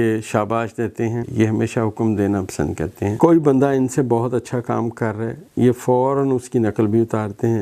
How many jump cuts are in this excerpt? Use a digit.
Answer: 2